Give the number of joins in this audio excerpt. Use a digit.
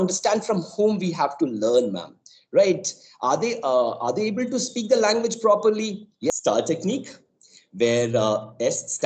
1